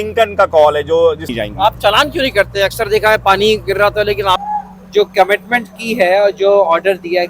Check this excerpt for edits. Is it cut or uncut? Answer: cut